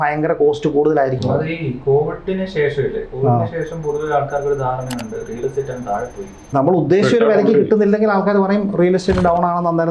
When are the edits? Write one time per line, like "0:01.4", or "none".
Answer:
0:01.2
0:06.5